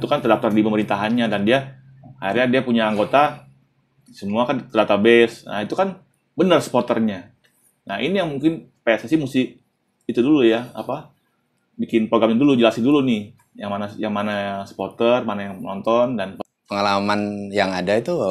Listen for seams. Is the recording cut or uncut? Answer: cut